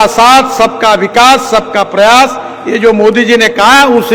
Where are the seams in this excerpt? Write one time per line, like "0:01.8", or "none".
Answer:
none

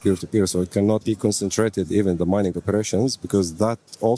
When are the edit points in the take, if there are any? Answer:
0:01.0

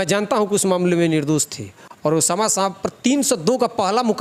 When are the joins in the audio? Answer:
none

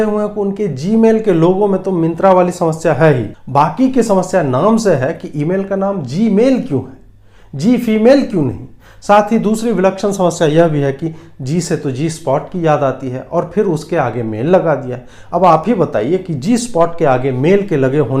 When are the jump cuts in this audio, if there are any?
0:03.3

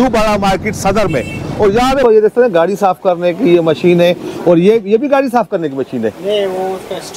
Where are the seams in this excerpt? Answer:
0:02.0

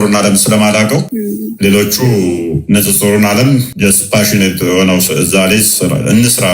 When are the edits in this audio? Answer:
0:01.1
0:03.7

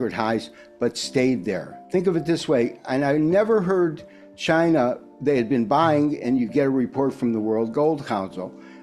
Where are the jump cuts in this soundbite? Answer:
0:01.7

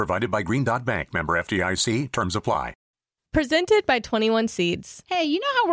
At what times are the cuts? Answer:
0:02.8

